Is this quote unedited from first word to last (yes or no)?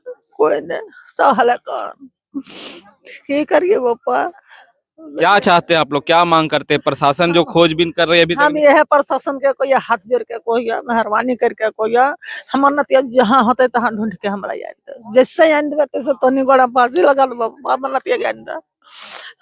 yes